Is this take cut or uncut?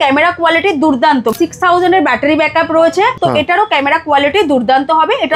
cut